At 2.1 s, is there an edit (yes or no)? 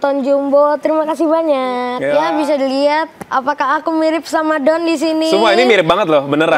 yes